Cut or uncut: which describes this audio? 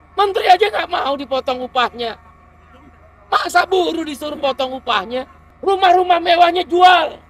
cut